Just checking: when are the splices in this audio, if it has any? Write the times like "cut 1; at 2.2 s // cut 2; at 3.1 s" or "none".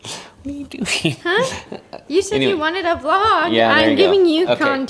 none